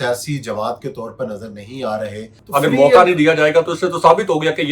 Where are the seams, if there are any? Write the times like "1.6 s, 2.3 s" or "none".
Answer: 2.3 s

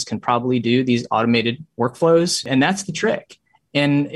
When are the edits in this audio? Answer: 2.5 s

